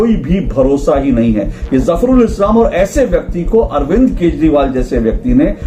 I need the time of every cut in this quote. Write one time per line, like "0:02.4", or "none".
none